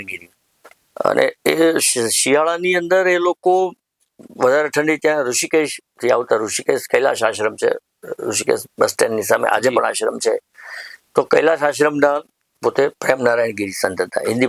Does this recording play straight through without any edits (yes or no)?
yes